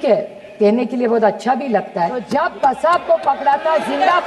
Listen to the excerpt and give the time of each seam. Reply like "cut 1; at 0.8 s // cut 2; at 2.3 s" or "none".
cut 1; at 2.2 s